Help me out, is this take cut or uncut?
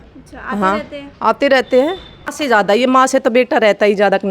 cut